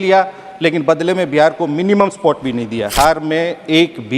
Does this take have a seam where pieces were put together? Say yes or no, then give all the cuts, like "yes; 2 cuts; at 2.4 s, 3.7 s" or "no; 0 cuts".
yes; 1 cut; at 2.9 s